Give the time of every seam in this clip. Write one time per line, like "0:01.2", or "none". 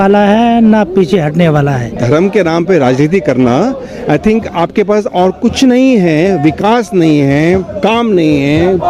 0:02.0